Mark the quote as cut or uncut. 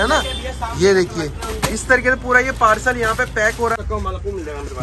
cut